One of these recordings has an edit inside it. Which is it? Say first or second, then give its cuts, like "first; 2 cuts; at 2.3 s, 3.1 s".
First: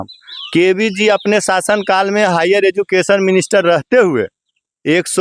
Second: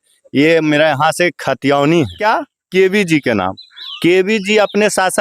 second; 1 cut; at 2.2 s